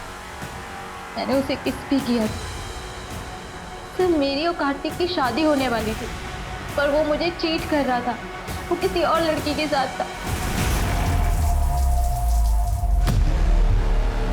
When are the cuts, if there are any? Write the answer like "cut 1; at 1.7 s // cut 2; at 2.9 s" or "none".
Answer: cut 1; at 10.5 s